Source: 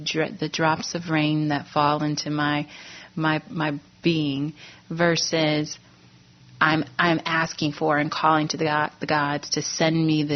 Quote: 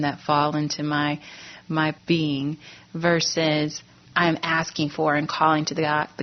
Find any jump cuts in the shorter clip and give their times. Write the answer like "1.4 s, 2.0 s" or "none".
2.0 s, 4.1 s